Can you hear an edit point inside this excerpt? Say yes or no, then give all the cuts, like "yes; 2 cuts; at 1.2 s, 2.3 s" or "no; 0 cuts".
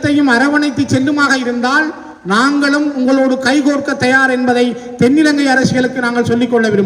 no; 0 cuts